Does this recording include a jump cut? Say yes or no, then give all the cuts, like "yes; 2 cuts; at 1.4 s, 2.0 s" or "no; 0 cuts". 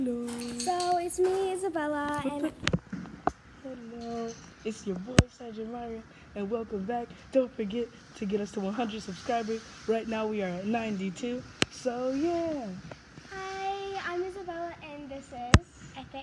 no; 0 cuts